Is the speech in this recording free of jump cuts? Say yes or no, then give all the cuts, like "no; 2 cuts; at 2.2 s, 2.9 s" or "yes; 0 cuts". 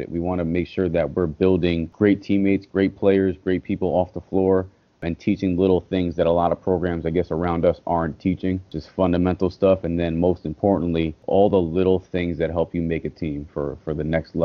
no; 4 cuts; at 1.9 s, 5.0 s, 8.8 s, 11.2 s